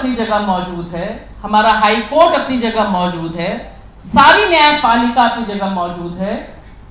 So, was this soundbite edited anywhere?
no; 0 cuts

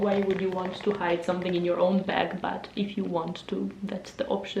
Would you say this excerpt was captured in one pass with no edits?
yes; 0 cuts

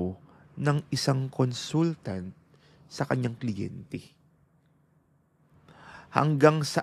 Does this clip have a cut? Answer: no; 0 cuts

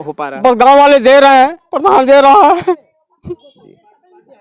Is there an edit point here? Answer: no; 0 cuts

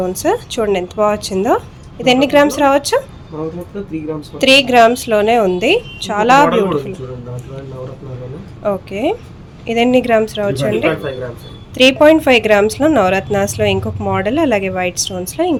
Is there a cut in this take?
no; 0 cuts

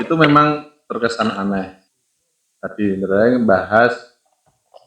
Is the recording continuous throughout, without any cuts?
no; 1 cut; at 1.8 s

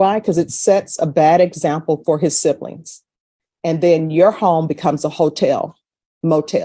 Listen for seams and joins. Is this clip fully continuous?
yes; 0 cuts

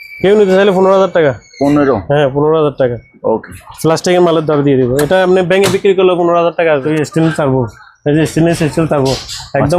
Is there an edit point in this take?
yes; 1 cut; at 6.9 s

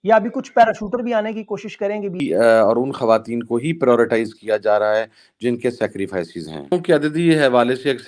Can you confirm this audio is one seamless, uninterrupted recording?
no; 2 cuts; at 2.2 s, 6.7 s

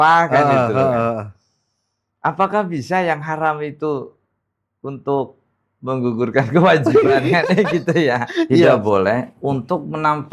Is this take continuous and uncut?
no; 1 cut; at 8.7 s

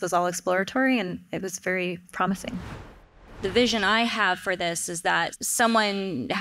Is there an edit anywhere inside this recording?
yes; 2 cuts; at 3.2 s, 5.3 s

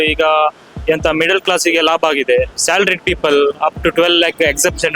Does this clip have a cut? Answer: yes; 1 cut; at 2.6 s

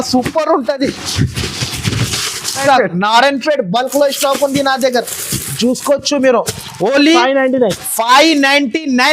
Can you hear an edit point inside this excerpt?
yes; 1 cut; at 2.6 s

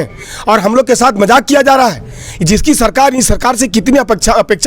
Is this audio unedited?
yes; 0 cuts

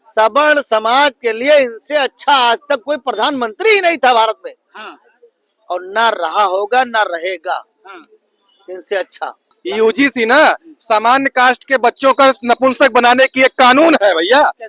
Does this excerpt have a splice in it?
yes; 1 cut; at 9.5 s

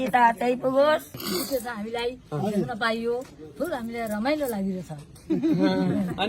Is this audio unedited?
no; 1 cut; at 1.2 s

